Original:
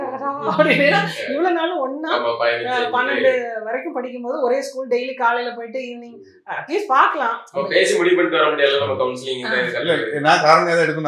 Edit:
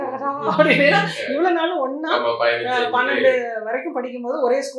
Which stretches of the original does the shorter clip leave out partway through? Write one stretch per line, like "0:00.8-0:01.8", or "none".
none